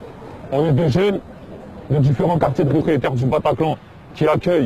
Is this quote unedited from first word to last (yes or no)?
yes